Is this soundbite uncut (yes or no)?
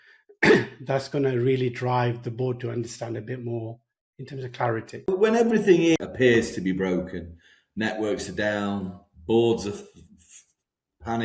no